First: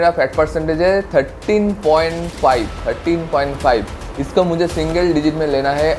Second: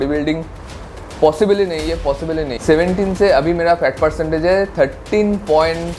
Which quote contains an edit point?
second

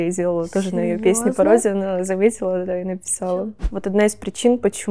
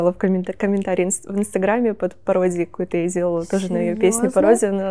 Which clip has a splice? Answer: first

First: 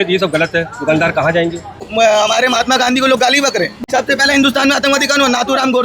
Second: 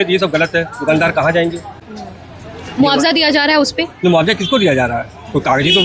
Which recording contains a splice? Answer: first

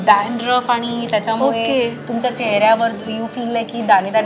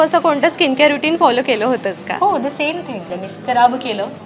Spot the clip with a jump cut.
second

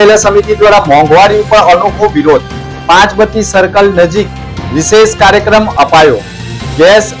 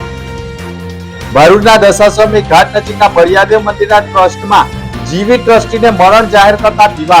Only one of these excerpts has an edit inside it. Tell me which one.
second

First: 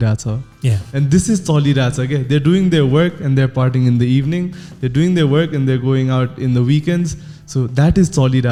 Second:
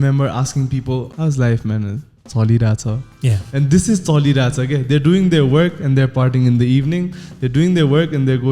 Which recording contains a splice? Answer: second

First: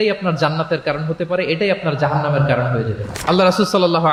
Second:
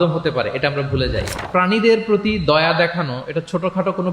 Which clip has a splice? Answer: second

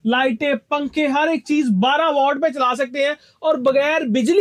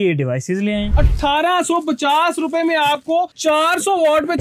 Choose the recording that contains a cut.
second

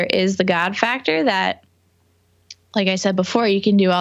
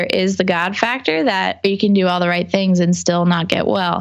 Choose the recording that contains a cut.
second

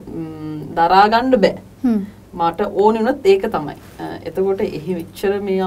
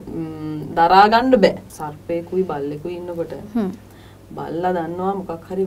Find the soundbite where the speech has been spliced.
second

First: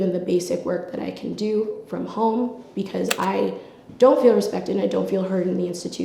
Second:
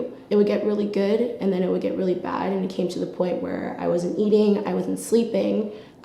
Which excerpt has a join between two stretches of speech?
first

